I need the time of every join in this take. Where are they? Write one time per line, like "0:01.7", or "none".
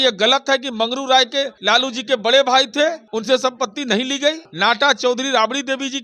0:01.5
0:03.0
0:04.5